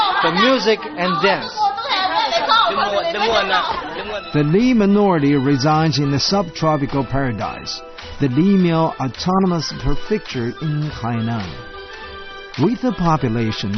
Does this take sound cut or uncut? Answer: uncut